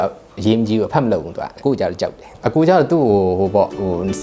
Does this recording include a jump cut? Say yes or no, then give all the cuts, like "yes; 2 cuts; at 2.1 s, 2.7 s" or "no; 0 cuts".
yes; 2 cuts; at 1.5 s, 2.3 s